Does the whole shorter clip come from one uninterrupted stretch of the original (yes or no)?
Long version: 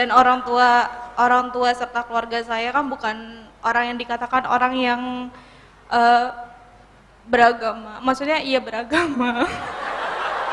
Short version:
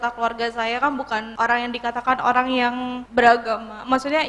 no